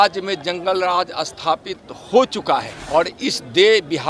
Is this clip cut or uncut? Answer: cut